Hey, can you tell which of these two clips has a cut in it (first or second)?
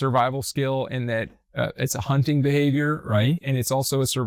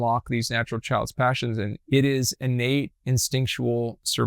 second